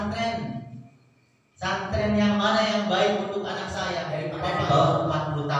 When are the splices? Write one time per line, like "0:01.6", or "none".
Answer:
0:04.4